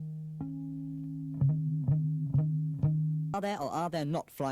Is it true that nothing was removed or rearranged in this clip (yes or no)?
no